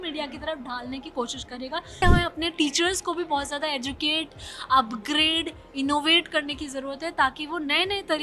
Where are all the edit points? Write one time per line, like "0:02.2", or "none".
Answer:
0:02.0